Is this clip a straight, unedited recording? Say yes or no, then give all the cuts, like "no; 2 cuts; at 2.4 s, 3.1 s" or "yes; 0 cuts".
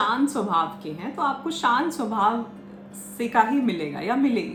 yes; 0 cuts